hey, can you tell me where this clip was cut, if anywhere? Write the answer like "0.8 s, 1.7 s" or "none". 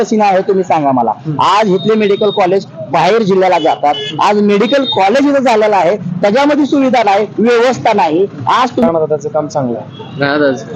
8.9 s